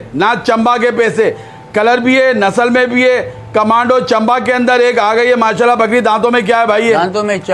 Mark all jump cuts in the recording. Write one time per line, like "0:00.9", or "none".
none